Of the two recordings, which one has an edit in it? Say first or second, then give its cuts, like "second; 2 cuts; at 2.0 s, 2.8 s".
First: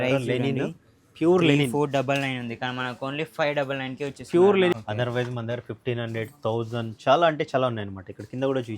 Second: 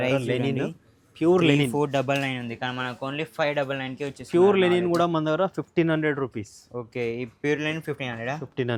first; 1 cut; at 4.7 s